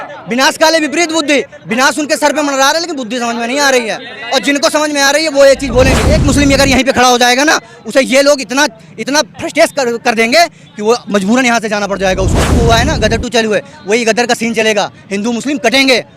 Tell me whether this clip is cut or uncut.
cut